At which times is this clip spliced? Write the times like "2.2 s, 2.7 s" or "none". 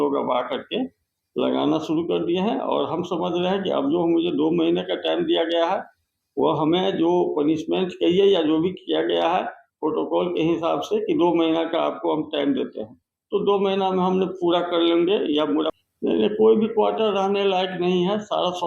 15.8 s

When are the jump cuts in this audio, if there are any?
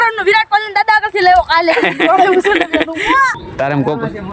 3.4 s

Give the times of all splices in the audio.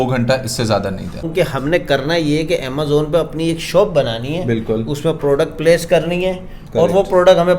1.3 s

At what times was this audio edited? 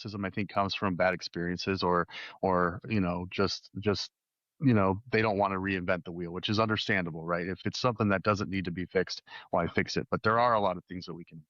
7.6 s

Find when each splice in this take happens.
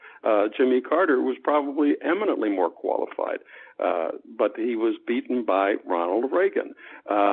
none

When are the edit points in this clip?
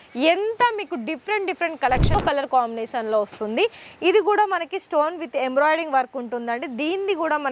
2.1 s

